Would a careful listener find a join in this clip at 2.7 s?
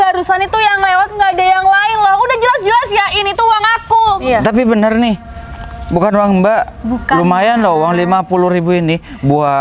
no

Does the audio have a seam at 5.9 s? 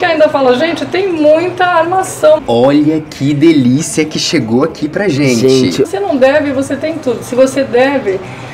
yes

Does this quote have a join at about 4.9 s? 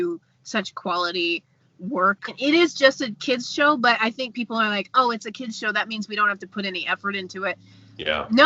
no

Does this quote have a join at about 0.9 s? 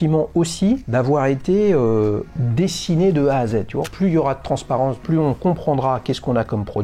yes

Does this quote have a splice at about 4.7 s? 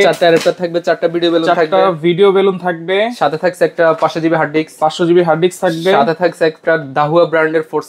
no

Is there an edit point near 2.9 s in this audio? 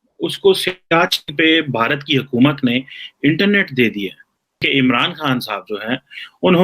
no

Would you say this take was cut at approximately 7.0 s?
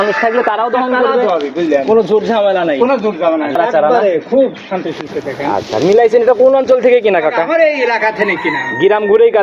no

